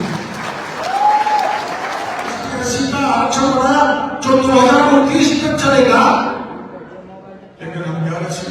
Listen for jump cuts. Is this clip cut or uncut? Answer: cut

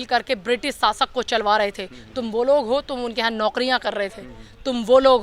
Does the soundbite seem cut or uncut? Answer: uncut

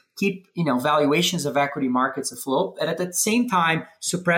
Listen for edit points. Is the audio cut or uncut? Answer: uncut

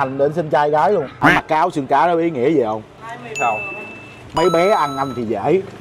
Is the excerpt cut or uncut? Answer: cut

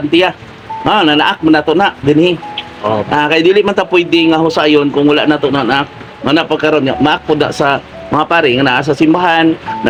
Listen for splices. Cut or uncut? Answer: uncut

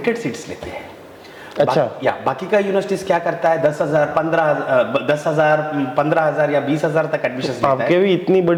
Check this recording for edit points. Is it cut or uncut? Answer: uncut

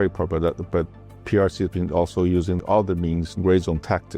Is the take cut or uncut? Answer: cut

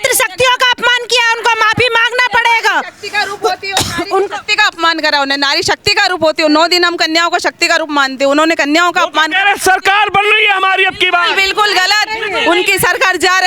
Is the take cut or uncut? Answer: uncut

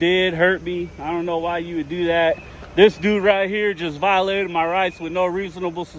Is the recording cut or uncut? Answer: uncut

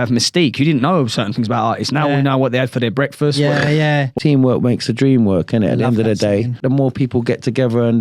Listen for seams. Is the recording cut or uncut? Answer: cut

